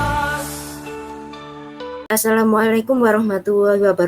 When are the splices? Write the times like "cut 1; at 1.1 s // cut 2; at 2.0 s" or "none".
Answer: cut 1; at 2.0 s